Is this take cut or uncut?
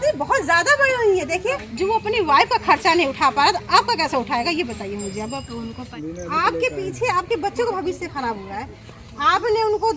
cut